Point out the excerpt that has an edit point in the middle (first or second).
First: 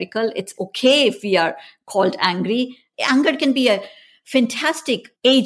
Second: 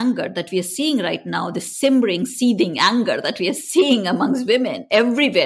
first